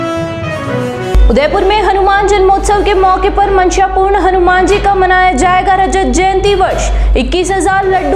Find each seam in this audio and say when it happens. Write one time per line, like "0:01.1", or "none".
0:00.9